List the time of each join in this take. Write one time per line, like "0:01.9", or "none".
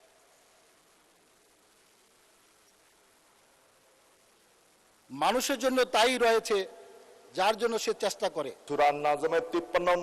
0:08.6